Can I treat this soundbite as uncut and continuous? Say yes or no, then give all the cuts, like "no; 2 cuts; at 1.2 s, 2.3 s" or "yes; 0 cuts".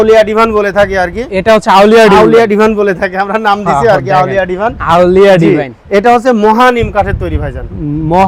yes; 0 cuts